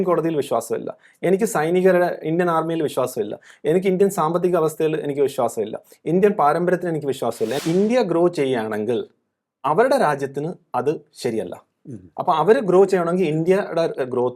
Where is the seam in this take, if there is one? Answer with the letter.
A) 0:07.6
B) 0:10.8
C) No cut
A